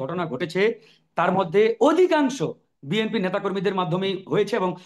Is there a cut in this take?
no; 0 cuts

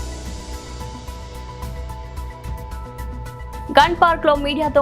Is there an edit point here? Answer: no; 0 cuts

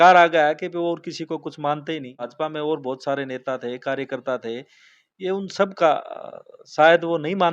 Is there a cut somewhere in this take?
no; 0 cuts

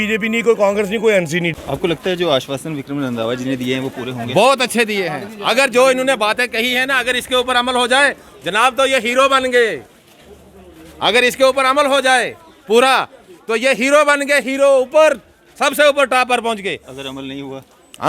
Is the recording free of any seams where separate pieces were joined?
no; 1 cut; at 1.5 s

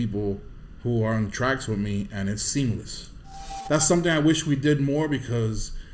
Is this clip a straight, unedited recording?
no; 1 cut; at 3.6 s

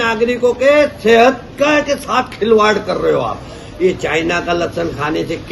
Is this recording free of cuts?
yes; 0 cuts

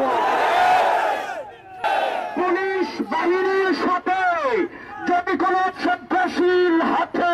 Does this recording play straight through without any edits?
no; 1 cut; at 1.8 s

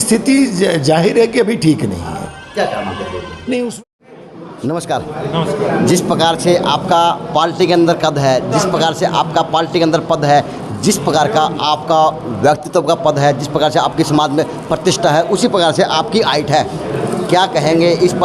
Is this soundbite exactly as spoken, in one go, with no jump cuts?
no; 1 cut; at 3.7 s

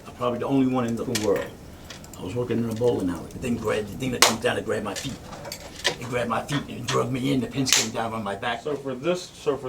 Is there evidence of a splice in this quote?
yes; 3 cuts; at 1.0 s, 3.4 s, 8.6 s

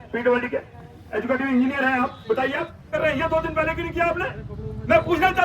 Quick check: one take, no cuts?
no; 1 cut; at 2.9 s

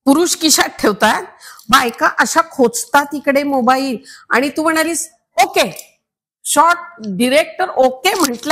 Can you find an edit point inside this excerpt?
no; 0 cuts

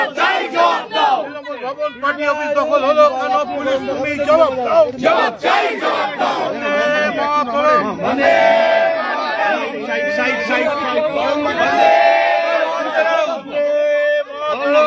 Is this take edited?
no; 0 cuts

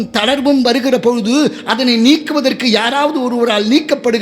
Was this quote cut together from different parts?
no; 0 cuts

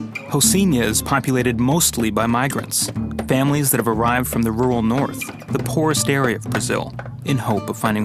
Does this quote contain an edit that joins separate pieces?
no; 0 cuts

